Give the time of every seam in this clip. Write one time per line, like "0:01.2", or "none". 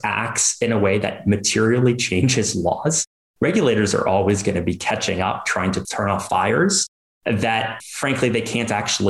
none